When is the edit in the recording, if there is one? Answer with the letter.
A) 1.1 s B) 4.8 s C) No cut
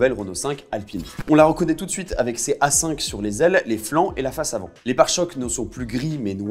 A